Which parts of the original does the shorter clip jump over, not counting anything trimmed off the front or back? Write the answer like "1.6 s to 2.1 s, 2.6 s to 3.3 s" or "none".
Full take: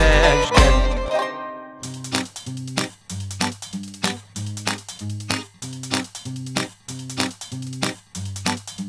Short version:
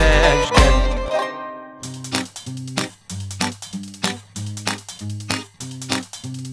5.5 s to 6.8 s